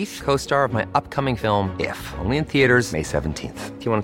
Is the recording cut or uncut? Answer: uncut